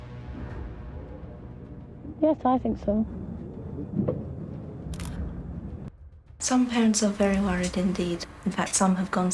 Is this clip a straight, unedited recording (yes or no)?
no